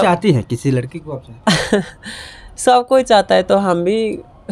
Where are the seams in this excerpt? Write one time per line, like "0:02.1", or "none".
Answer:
none